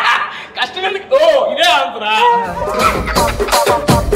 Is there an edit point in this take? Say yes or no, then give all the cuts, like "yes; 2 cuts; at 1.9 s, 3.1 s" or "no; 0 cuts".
yes; 1 cut; at 2.7 s